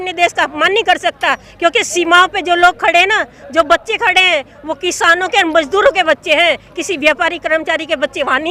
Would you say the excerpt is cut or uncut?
uncut